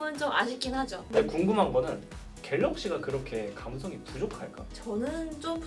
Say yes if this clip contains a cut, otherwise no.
yes